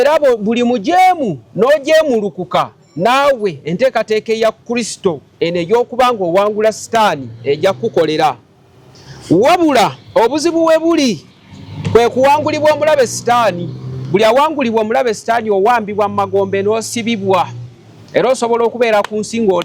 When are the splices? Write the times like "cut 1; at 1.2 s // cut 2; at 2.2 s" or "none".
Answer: none

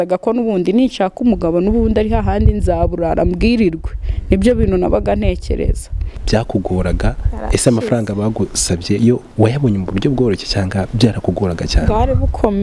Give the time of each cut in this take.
cut 1; at 6.2 s

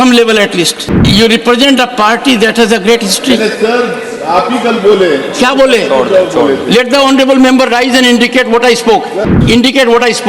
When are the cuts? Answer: cut 1; at 0.9 s // cut 2; at 9.3 s

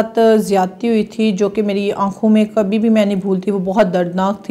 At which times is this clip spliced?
none

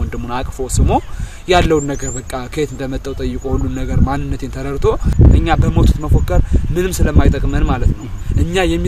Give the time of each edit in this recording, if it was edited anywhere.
cut 1; at 5.1 s

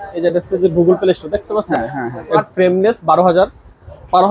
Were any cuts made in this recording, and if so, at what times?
cut 1; at 2.4 s

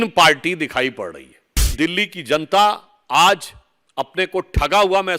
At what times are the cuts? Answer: cut 1; at 1.8 s

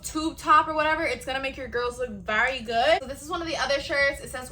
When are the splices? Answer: cut 1; at 3.1 s

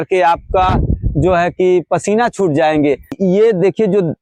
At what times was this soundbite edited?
none

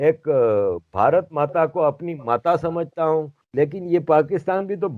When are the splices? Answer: cut 1; at 3.4 s

